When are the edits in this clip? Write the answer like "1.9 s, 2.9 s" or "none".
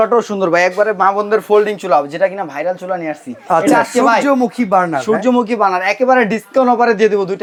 none